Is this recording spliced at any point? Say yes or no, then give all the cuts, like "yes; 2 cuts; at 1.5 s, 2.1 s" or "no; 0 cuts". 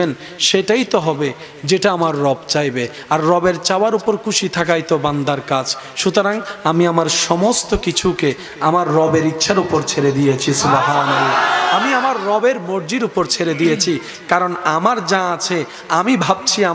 no; 0 cuts